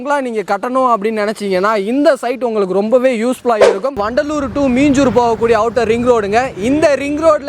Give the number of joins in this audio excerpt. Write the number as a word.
one